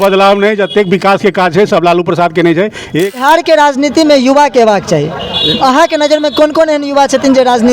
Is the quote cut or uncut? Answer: cut